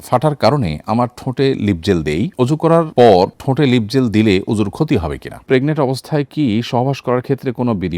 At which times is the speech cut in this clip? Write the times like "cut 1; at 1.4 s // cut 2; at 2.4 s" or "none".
cut 1; at 5.4 s